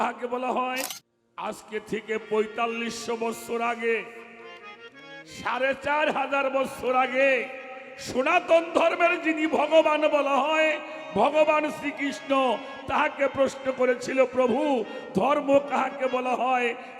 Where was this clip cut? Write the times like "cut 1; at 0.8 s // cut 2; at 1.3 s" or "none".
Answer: cut 1; at 1.0 s